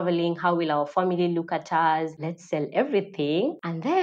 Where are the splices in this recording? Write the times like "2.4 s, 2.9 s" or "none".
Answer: 2.2 s